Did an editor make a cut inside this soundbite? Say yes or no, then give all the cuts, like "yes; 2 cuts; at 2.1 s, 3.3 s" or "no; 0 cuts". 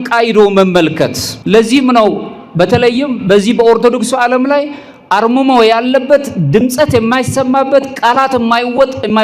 yes; 1 cut; at 1.3 s